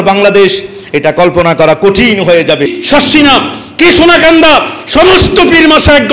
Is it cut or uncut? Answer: cut